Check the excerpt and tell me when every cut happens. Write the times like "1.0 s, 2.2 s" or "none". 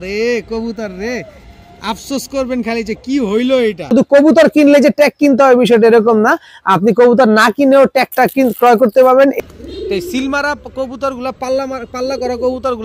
3.9 s, 9.4 s